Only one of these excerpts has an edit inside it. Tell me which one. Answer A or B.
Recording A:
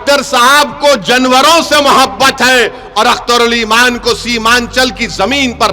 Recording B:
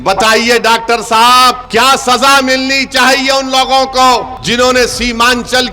B